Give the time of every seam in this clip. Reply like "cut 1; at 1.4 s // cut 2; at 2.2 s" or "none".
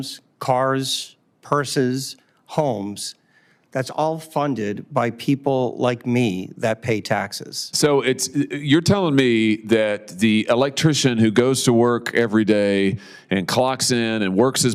none